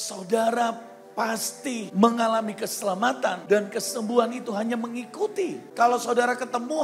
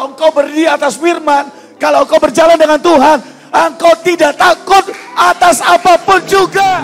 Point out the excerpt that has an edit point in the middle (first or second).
first